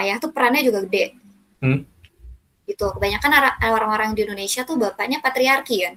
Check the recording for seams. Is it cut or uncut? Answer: uncut